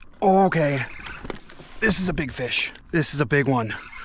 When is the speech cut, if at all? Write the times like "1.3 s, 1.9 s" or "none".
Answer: 2.7 s